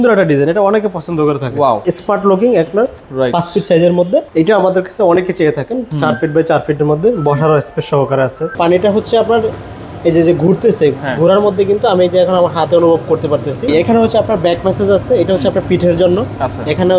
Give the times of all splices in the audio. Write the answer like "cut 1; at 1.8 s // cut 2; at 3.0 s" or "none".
cut 1; at 1.8 s // cut 2; at 4.3 s // cut 3; at 8.5 s // cut 4; at 13.7 s